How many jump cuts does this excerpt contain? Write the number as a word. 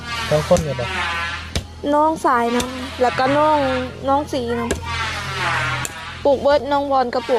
zero